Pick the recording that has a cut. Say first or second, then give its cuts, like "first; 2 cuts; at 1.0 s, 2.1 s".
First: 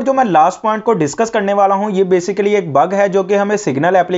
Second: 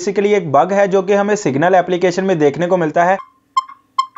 second; 1 cut; at 3.2 s